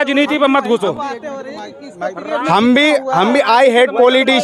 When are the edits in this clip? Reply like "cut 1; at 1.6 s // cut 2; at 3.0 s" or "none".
none